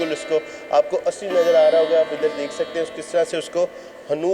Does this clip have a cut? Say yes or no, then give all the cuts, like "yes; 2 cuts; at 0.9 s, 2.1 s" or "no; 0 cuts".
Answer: no; 0 cuts